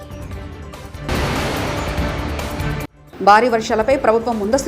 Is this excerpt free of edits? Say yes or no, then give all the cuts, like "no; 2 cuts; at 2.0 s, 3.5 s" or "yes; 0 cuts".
no; 2 cuts; at 1.1 s, 3.0 s